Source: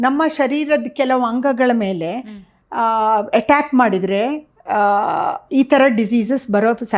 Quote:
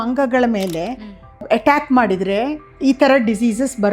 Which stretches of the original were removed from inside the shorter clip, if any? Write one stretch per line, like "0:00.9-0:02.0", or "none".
0:02.7-0:03.3
0:04.5-0:05.4